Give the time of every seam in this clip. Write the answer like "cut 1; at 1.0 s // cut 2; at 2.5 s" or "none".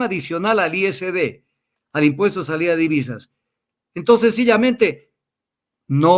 none